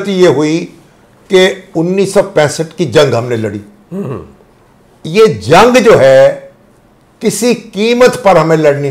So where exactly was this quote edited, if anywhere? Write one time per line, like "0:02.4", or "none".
none